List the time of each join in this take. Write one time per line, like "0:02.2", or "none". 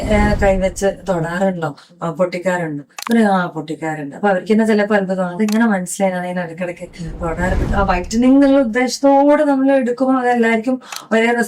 0:07.7